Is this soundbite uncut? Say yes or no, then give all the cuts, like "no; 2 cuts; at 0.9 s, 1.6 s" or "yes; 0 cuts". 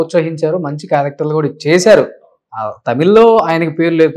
yes; 0 cuts